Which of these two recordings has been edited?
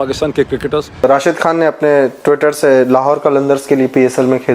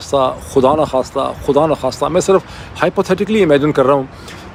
first; 1 cut; at 1.0 s

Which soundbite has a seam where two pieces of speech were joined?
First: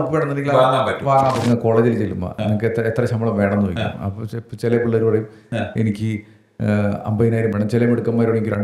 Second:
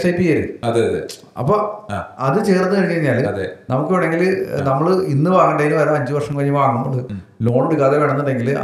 first; 1 cut; at 1.4 s

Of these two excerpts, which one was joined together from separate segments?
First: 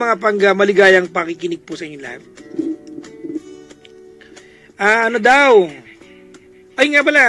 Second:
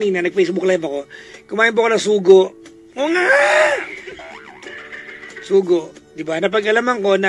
first; 1 cut; at 1.3 s

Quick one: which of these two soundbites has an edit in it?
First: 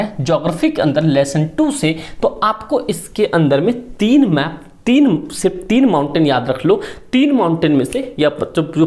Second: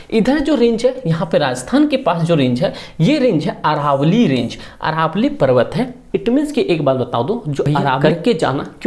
second; 1 cut; at 7.8 s

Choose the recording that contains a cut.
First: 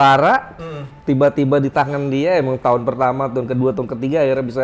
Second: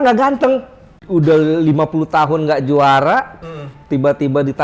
second; 1 cut; at 1.0 s

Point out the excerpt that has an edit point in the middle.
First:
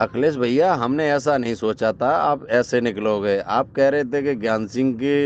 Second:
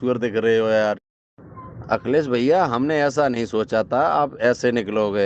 second; 1 cut; at 1.0 s

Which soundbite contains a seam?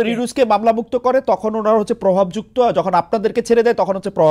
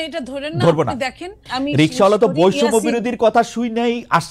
second; 1 cut; at 1.4 s

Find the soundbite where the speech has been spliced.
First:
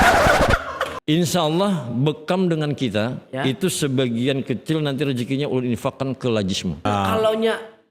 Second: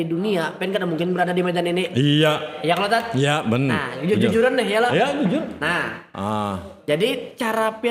first; 2 cuts; at 0.9 s, 6.8 s

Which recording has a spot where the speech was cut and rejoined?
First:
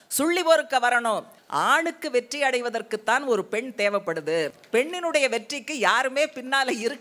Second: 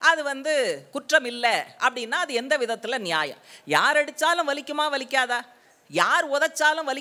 first; 2 cuts; at 1.4 s, 4.6 s

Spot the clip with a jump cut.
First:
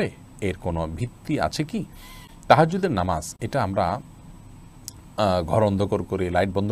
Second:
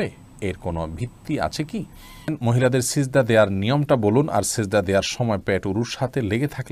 second; 1 cut; at 2.4 s

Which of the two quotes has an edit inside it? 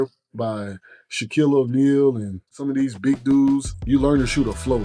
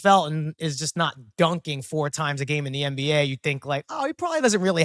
first; 2 cuts; at 2.6 s, 3.7 s

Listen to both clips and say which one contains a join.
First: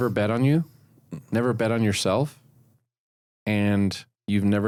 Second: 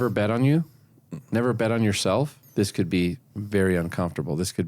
second; 1 cut; at 2.4 s

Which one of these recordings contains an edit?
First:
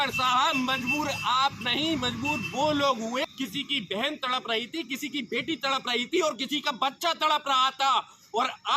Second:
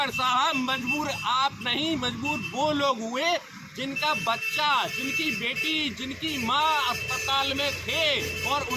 first; 1 cut; at 3.2 s

